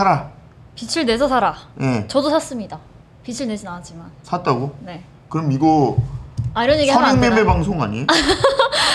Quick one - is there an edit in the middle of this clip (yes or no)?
no